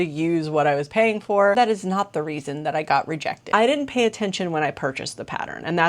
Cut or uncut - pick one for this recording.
cut